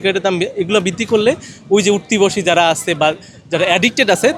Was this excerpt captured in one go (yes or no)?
yes